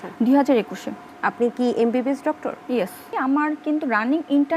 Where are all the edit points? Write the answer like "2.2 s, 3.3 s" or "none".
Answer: 3.1 s